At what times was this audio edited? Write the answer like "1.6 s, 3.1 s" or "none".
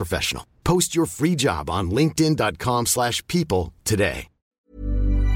4.3 s